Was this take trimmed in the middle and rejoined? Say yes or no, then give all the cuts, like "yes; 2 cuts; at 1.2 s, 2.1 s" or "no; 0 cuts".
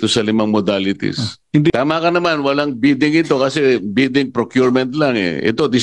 yes; 1 cut; at 1.7 s